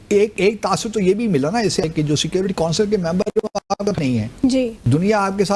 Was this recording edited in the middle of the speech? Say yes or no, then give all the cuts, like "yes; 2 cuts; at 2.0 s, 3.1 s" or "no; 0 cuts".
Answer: yes; 1 cut; at 1.9 s